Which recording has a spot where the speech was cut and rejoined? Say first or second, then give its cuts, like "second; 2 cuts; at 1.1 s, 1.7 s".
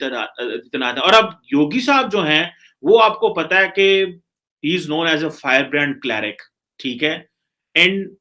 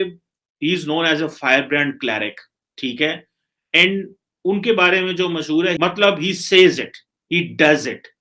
second; 1 cut; at 5.8 s